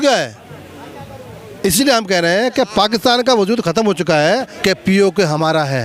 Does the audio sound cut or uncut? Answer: cut